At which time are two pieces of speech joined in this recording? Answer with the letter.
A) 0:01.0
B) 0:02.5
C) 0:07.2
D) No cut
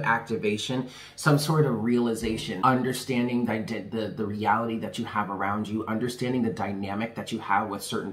B